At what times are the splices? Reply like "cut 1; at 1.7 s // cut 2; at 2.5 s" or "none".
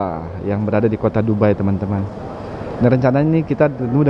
none